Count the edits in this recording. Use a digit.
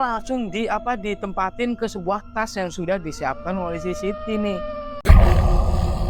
1